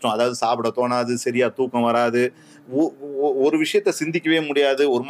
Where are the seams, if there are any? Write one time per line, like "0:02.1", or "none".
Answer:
none